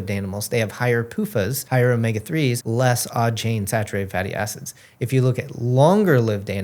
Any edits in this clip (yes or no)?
yes